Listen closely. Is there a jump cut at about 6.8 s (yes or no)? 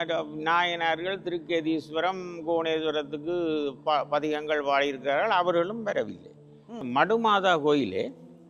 yes